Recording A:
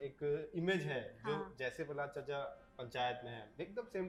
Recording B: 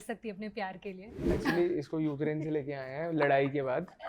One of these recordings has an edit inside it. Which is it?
B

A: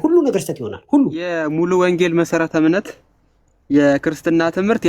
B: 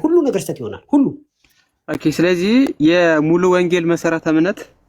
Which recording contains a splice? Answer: A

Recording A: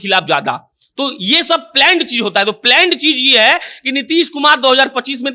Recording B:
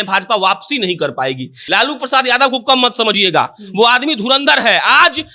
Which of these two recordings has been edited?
B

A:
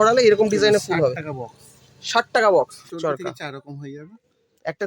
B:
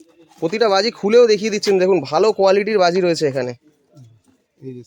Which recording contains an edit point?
A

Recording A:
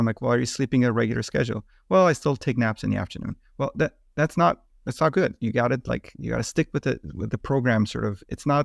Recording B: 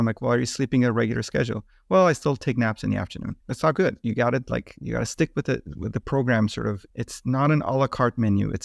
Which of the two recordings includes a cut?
B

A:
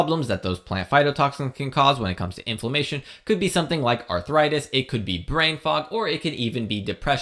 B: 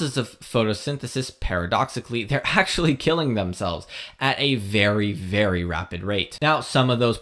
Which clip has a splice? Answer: B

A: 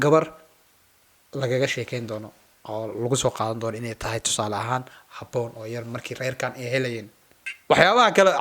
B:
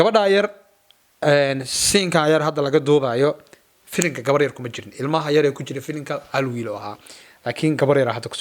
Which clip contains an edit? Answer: A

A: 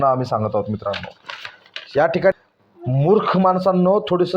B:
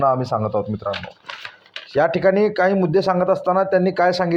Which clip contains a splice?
A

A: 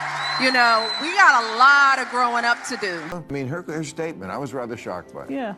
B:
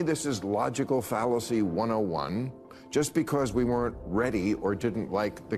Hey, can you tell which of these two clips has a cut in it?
A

